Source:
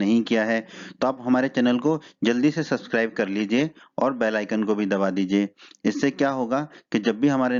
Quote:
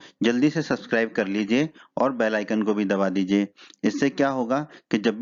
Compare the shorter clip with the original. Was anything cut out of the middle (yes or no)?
no